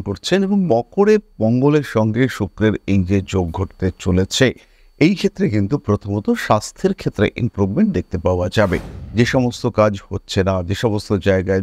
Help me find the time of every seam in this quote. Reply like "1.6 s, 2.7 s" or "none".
8.9 s